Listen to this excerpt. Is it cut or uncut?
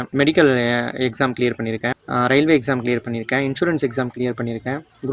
uncut